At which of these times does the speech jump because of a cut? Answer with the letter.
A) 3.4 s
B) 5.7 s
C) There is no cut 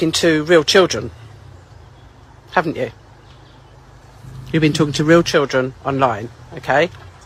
C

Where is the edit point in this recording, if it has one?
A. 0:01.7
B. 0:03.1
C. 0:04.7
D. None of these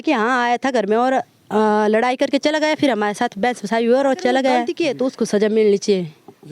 C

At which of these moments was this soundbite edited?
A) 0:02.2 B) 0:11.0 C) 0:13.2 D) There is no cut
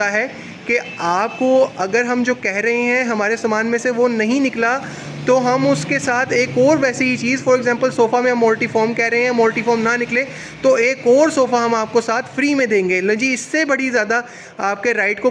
D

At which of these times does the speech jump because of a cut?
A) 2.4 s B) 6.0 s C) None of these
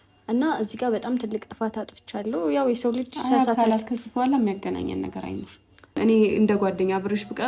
B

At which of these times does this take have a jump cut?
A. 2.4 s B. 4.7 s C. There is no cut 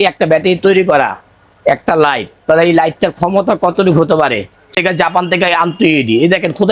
B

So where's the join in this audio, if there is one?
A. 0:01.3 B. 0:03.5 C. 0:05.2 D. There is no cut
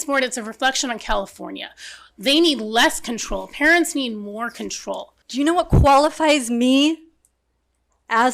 C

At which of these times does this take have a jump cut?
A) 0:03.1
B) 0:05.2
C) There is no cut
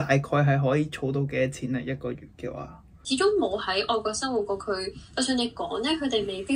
A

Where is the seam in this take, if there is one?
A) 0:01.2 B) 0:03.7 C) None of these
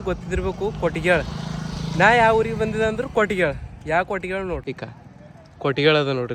C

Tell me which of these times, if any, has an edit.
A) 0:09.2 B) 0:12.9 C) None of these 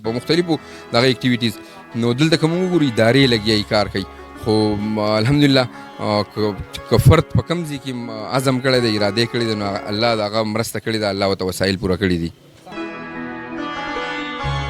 C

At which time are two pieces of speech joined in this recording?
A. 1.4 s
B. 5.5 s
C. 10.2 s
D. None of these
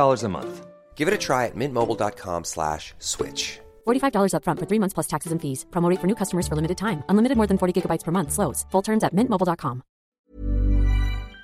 C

